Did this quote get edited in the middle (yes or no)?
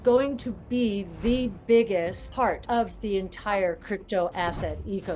no